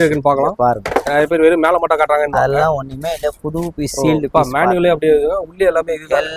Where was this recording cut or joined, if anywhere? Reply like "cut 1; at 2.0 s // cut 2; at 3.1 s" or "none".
none